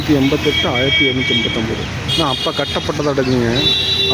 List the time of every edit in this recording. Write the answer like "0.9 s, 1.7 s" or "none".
none